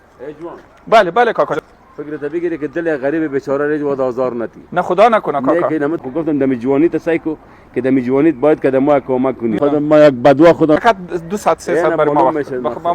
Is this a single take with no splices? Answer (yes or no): no